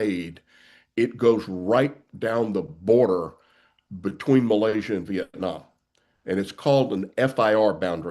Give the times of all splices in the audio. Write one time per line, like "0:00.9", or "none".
none